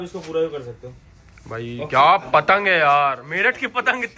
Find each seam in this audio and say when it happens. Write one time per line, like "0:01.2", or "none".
none

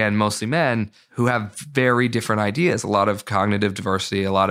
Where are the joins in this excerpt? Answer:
0:01.0

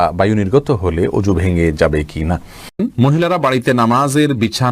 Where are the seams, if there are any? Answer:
0:03.1

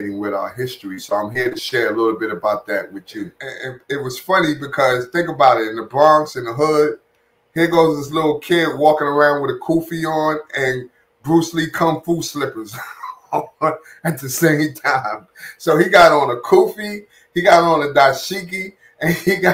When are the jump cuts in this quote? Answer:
0:03.7

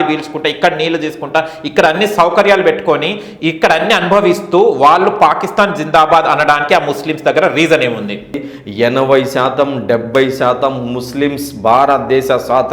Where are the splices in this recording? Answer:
0:08.4

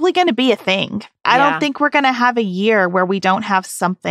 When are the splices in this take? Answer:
0:01.2

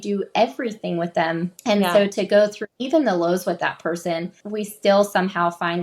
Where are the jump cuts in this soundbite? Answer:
0:01.5
0:02.7
0:04.5

